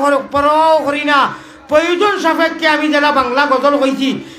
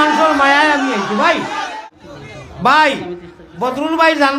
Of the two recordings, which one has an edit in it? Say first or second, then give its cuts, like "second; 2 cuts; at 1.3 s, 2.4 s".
second; 1 cut; at 1.7 s